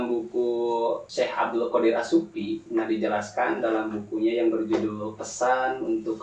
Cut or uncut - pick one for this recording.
cut